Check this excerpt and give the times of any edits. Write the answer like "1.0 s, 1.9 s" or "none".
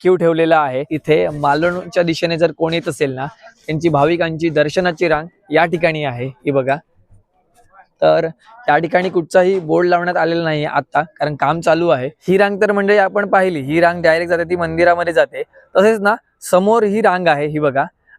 0.9 s, 12.1 s

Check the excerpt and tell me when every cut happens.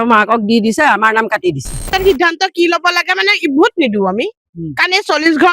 1.8 s

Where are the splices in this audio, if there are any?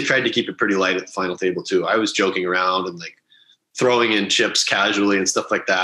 none

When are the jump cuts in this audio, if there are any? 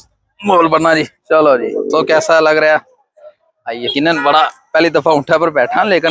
2.0 s

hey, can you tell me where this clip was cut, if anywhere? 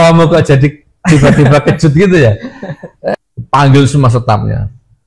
3.3 s

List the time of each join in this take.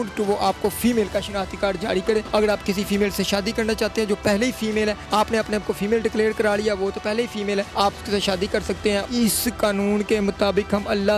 2.3 s, 5.0 s, 7.7 s, 9.0 s

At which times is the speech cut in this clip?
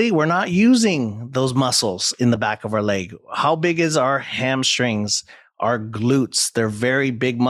none

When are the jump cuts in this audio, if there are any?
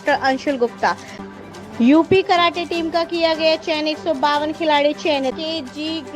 1.1 s, 5.3 s

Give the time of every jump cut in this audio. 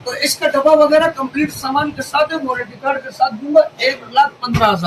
none

